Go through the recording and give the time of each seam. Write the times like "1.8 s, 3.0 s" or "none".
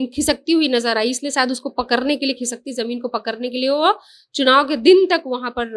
none